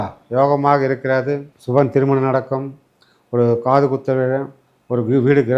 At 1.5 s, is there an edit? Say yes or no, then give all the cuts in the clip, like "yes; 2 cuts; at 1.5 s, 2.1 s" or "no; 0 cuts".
yes; 1 cut; at 1.5 s